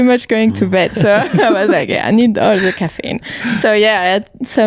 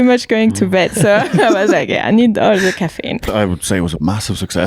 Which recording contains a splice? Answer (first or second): second